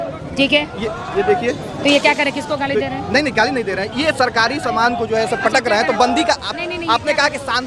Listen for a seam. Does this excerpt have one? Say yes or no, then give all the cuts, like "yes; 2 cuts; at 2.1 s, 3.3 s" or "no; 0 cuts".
no; 0 cuts